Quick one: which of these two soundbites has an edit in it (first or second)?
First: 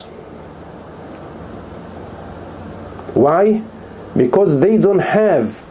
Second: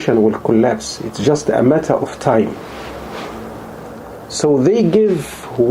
second